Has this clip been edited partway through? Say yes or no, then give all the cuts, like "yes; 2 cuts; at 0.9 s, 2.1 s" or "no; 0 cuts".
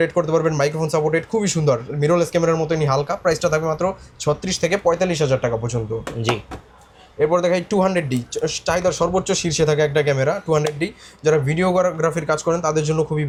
no; 0 cuts